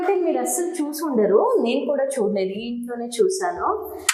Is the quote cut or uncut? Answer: uncut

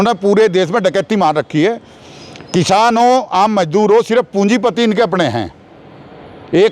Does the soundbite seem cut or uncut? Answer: uncut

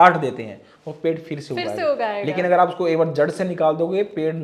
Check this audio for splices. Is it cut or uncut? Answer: uncut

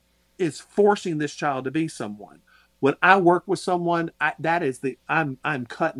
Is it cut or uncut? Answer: uncut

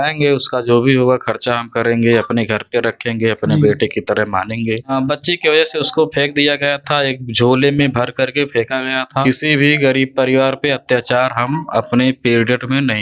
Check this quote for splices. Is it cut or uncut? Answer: cut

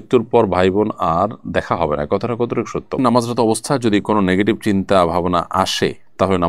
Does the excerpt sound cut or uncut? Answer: cut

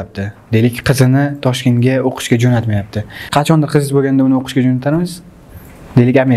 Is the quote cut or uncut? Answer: cut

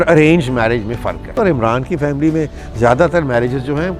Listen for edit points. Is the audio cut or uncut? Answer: cut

